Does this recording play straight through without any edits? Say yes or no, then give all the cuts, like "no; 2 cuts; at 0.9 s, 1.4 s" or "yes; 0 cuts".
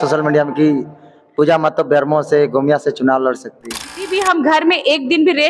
no; 1 cut; at 4.1 s